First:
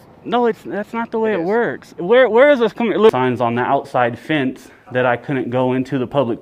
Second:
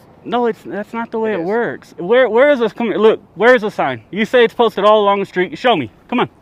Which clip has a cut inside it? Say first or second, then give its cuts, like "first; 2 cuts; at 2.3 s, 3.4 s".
first; 1 cut; at 3.1 s